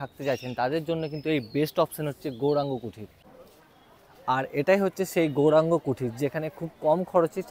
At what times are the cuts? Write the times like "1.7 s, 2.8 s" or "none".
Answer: none